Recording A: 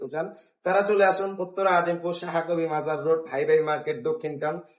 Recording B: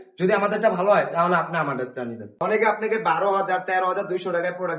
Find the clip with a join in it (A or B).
B